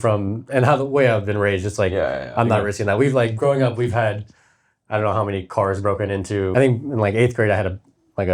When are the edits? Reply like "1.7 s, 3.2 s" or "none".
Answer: 6.5 s